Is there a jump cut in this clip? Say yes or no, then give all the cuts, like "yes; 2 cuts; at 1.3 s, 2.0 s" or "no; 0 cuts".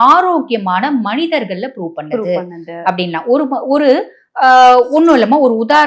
no; 0 cuts